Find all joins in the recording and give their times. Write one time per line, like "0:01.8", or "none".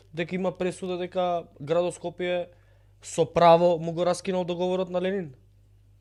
none